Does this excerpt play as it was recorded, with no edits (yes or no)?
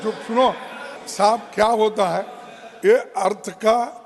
no